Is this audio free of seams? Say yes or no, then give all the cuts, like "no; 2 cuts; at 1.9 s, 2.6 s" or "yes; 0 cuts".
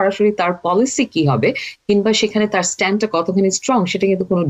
yes; 0 cuts